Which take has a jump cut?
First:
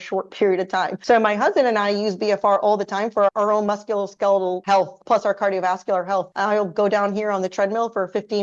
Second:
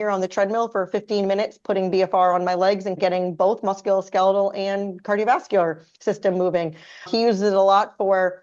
first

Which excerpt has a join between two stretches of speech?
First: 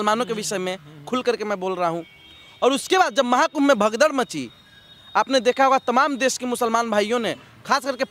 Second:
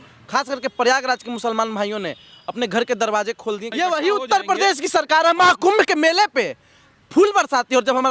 second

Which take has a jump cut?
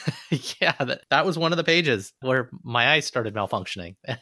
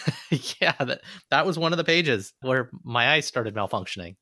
first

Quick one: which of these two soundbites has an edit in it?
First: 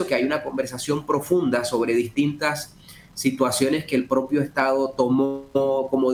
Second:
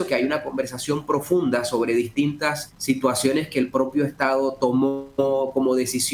second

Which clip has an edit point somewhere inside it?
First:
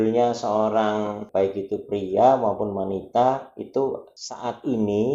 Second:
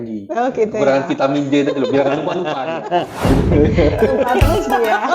first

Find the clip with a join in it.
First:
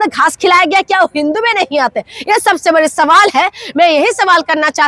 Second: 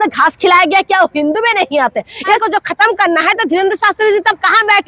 second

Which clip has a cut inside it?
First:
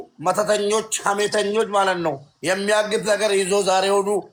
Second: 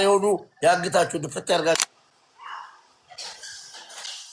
second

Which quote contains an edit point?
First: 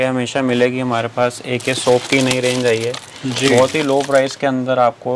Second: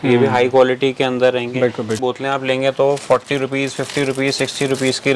second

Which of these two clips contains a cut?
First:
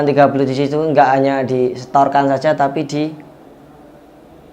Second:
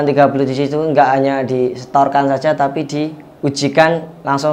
second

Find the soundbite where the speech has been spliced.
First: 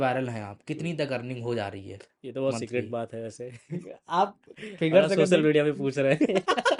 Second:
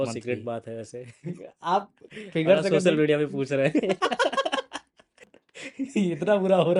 second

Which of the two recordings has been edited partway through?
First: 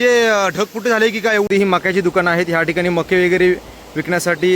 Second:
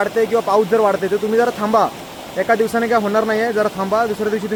first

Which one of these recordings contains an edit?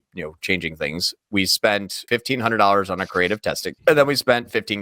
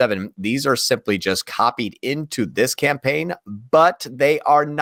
first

